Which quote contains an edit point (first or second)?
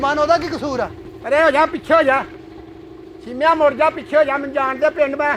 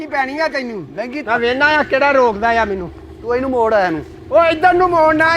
second